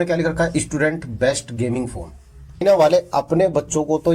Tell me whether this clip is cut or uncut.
cut